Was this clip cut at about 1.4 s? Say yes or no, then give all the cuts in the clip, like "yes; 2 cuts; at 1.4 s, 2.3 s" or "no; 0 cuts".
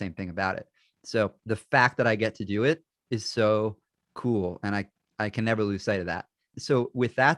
yes; 1 cut; at 1.4 s